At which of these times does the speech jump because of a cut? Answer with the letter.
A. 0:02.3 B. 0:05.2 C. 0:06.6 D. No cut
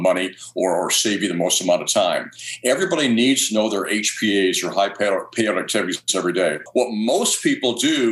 C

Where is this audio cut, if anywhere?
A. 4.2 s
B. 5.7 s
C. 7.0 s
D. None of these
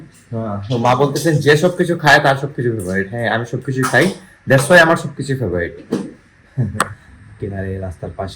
C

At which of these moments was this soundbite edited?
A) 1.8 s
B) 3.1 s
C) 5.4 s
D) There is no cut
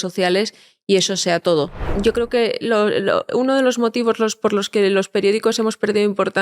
A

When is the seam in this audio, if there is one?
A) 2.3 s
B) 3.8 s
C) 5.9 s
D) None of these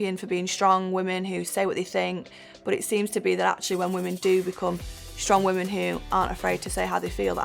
D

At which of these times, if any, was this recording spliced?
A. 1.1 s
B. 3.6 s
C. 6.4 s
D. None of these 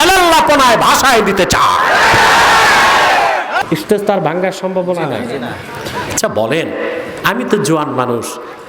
B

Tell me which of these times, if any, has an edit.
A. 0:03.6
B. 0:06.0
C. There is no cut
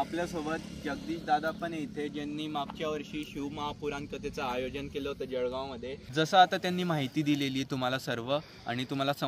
B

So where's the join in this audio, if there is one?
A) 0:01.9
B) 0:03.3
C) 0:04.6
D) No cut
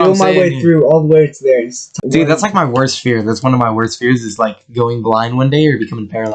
A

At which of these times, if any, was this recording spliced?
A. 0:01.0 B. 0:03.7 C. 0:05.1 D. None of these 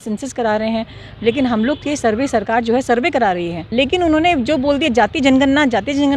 B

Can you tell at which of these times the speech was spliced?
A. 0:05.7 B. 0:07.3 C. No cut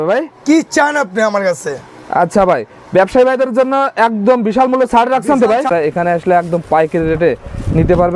A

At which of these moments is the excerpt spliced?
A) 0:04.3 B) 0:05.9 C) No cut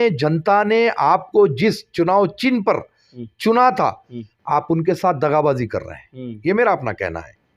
C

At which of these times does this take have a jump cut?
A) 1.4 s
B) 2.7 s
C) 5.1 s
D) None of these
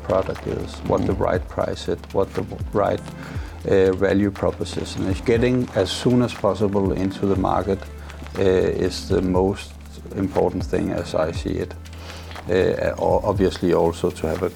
C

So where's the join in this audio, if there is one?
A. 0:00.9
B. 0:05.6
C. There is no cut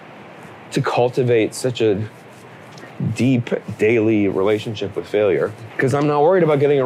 B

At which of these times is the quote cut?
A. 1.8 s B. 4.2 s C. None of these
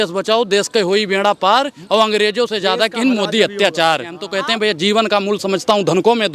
B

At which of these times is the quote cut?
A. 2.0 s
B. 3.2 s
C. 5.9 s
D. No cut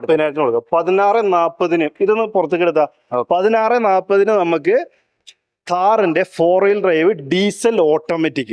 D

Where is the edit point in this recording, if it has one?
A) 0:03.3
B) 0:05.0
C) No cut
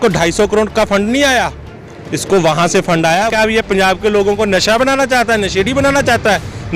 A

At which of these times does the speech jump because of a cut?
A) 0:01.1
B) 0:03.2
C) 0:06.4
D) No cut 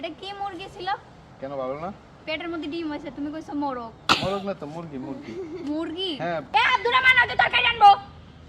C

